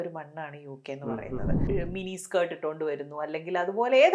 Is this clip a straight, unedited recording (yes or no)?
no